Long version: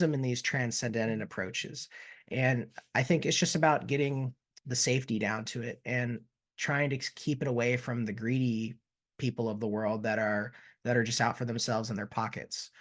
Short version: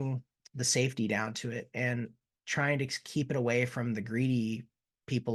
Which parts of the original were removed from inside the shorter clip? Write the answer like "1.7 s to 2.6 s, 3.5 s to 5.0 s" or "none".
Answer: none